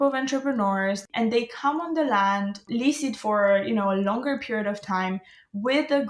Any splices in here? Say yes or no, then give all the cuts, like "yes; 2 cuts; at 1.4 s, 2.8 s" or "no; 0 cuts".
yes; 1 cut; at 1.0 s